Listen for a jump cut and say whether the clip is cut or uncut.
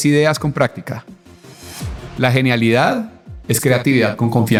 uncut